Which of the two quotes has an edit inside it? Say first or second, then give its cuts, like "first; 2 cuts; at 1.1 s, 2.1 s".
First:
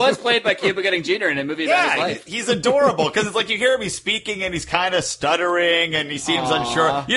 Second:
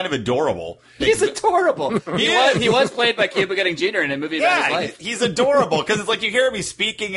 second; 1 cut; at 0.9 s